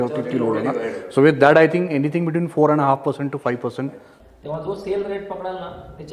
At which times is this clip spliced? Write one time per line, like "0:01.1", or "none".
0:04.1